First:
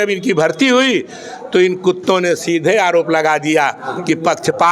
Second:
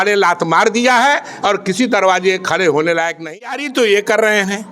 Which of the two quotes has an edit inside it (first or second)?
second